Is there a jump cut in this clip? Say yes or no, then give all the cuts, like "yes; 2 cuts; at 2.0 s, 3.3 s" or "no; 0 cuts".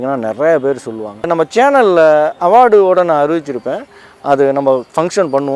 yes; 1 cut; at 1.3 s